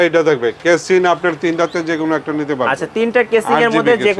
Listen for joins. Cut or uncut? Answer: uncut